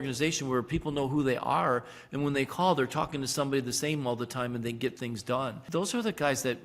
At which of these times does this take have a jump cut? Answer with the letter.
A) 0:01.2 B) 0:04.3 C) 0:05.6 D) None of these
C